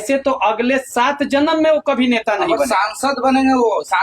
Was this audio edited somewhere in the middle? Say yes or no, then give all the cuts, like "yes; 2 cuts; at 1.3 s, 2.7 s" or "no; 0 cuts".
no; 0 cuts